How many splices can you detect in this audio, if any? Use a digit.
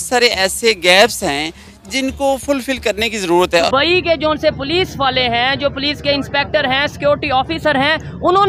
1